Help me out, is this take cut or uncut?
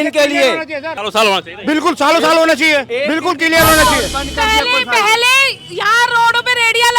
cut